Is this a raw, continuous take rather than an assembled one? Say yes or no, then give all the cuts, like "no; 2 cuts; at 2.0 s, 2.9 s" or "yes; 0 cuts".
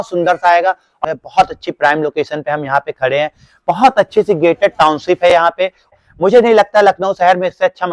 no; 2 cuts; at 1.0 s, 5.9 s